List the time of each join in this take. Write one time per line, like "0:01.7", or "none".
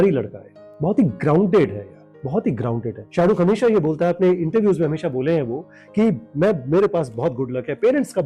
0:03.0